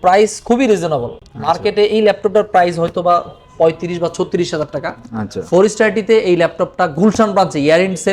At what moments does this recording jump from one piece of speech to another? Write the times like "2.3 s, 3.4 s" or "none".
none

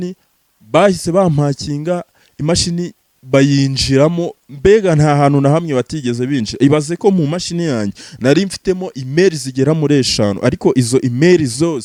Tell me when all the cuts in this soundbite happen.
none

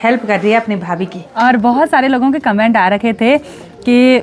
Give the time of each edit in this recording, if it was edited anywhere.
1.2 s

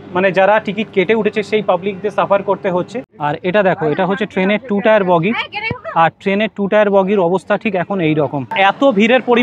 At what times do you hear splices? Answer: 3.0 s, 8.5 s

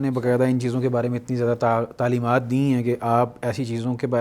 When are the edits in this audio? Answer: none

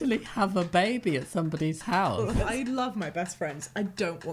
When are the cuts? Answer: 2.5 s

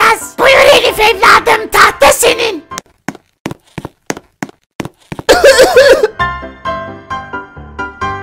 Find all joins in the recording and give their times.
2.7 s

